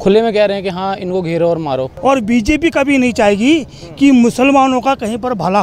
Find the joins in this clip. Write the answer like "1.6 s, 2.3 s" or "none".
1.9 s